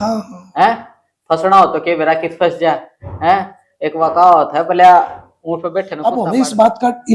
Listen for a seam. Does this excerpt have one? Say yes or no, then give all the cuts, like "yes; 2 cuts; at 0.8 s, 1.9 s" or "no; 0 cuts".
yes; 1 cut; at 5.9 s